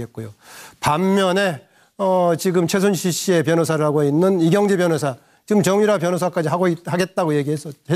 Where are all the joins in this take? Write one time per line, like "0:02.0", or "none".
0:03.0